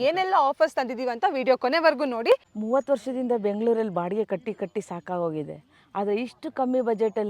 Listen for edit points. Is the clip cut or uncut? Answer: cut